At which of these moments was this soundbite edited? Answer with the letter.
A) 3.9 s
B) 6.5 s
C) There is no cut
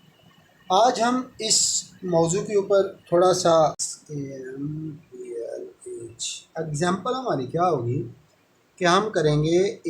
A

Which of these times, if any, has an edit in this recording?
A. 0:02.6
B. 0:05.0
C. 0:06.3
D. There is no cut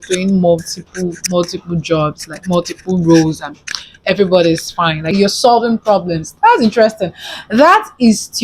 B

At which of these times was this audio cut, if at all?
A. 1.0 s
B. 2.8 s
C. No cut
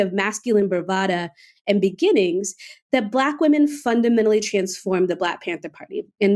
C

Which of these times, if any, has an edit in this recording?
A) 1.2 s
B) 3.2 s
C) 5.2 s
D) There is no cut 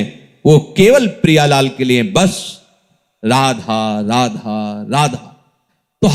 D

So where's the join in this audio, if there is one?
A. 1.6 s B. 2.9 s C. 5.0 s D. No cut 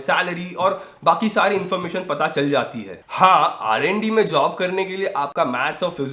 B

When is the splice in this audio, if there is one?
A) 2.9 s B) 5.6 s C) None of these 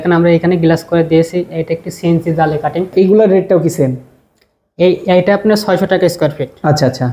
A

